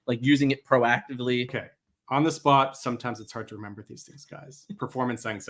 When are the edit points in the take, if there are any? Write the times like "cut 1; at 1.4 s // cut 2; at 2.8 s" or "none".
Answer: cut 1; at 1.6 s